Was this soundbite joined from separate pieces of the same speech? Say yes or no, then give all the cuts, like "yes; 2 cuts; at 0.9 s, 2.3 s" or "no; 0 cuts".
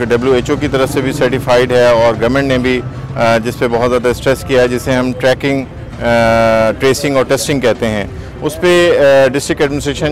no; 0 cuts